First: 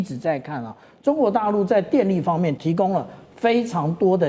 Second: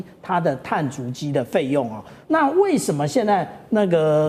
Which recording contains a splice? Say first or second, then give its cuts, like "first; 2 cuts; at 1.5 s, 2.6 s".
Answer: first; 1 cut; at 2.6 s